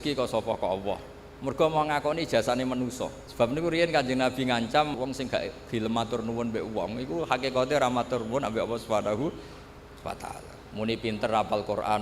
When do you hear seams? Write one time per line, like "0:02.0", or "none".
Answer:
0:03.2
0:04.9
0:10.6